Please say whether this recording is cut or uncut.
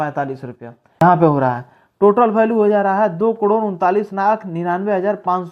cut